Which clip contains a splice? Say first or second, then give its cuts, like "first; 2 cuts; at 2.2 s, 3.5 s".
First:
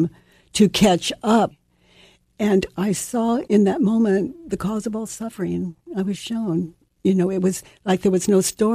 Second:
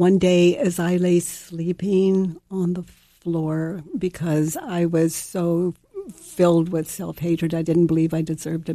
first; 2 cuts; at 1.6 s, 3.4 s